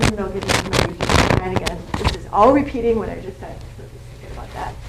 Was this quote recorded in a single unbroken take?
no; 1 cut; at 1.0 s

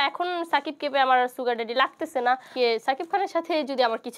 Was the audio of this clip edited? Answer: yes; 1 cut; at 2.5 s

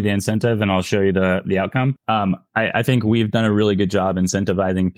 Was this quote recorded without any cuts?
no; 1 cut; at 2.0 s

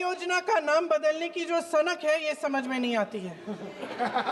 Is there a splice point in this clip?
no; 0 cuts

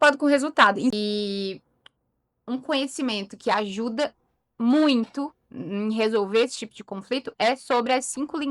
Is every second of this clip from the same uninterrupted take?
no; 1 cut; at 0.9 s

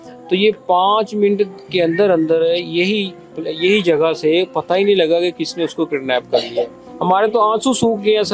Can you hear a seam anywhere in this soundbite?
yes; 1 cut; at 6.8 s

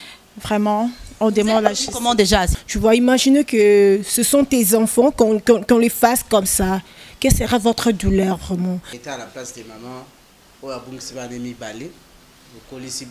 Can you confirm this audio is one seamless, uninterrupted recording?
no; 2 cuts; at 2.5 s, 9.0 s

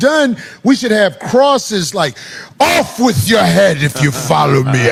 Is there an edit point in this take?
no; 0 cuts

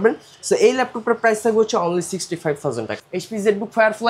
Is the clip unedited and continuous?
no; 1 cut; at 2.9 s

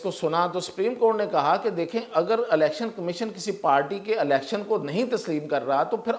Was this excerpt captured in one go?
yes; 0 cuts

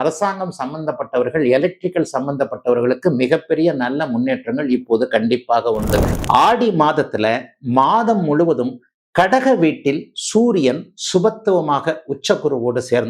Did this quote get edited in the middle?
yes; 1 cut; at 6.1 s

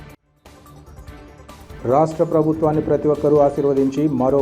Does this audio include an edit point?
yes; 1 cut; at 1.6 s

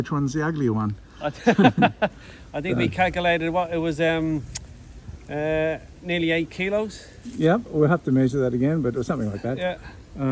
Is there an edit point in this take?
no; 0 cuts

